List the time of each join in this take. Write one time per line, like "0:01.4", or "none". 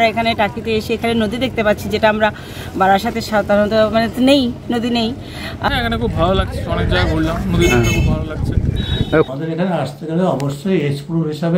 0:05.7
0:09.3